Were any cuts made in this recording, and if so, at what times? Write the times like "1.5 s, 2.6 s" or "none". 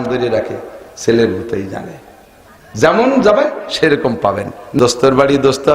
4.7 s